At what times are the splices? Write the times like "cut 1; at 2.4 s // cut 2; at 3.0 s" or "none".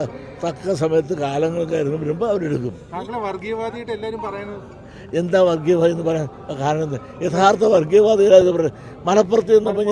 none